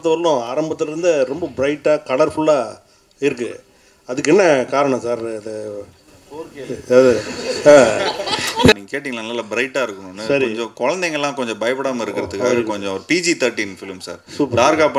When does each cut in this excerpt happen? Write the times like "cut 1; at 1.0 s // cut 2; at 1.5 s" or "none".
cut 1; at 8.7 s